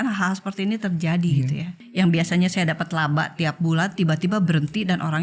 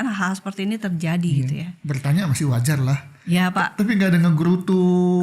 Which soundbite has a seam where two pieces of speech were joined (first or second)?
first